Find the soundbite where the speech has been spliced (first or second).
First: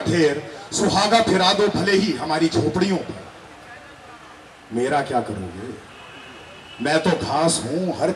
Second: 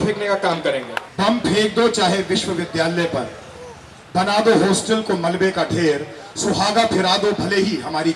second